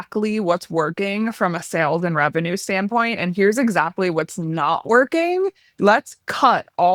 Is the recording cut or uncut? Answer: uncut